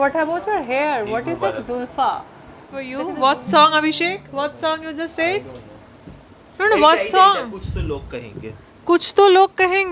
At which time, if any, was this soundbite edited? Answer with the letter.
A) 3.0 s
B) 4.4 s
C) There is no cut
A